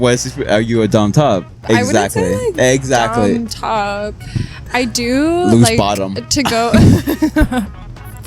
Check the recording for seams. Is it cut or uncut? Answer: cut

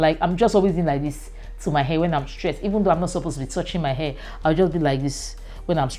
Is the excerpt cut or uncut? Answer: uncut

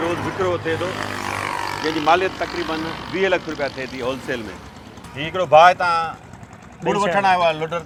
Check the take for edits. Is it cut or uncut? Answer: uncut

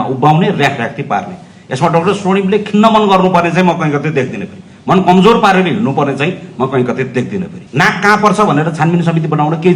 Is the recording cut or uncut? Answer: cut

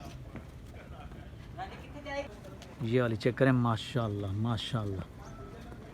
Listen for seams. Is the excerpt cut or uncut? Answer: cut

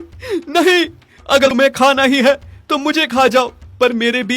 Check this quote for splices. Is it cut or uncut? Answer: cut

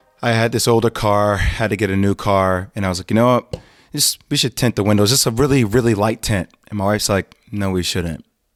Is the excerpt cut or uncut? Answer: uncut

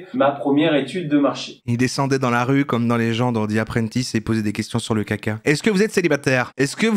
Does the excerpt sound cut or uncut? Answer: uncut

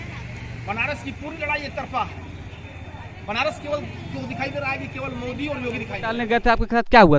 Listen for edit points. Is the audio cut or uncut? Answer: cut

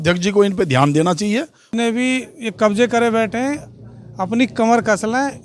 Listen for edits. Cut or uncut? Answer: cut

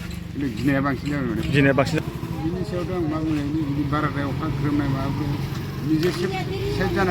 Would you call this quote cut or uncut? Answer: cut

